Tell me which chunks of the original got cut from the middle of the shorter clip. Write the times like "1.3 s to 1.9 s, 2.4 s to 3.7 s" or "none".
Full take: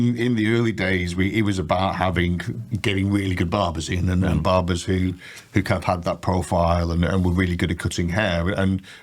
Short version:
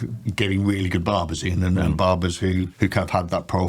5.2 s to 5.4 s